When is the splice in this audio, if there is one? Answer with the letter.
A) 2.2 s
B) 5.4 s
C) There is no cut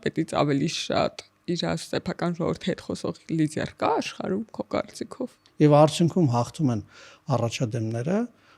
B